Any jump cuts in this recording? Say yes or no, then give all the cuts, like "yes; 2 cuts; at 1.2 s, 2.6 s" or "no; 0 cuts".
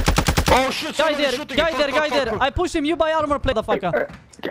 yes; 1 cut; at 3.5 s